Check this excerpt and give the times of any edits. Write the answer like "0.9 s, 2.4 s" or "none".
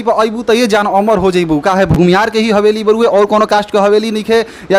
1.9 s